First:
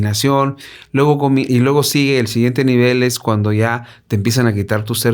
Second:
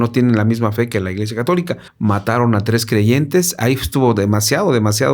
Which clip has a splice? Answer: second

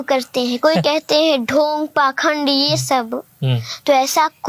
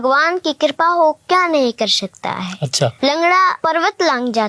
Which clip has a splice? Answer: second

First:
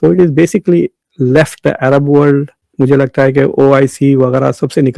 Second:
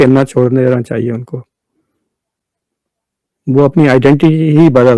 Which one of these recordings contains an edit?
first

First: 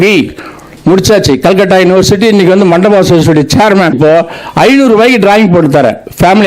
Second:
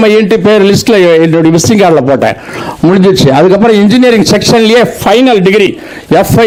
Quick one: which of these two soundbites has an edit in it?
first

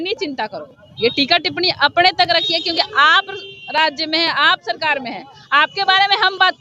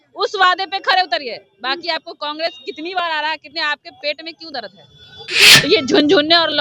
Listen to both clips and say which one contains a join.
second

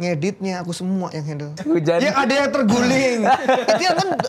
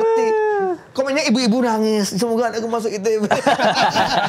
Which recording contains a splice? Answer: first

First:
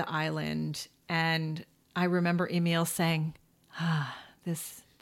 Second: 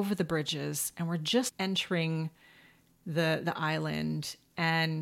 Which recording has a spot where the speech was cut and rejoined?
second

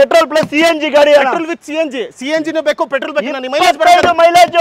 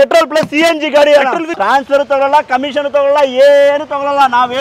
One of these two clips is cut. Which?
second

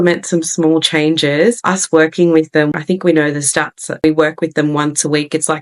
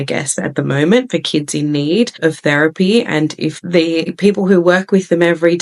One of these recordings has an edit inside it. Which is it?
first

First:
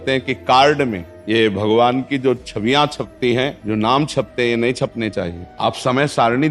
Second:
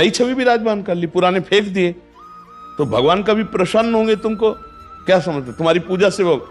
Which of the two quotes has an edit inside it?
first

